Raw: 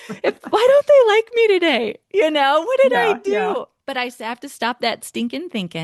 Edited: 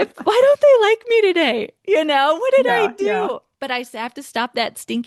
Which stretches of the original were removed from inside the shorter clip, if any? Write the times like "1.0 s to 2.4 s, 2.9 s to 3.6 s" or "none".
none